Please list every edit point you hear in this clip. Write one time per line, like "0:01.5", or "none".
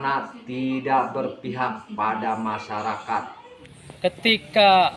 0:03.9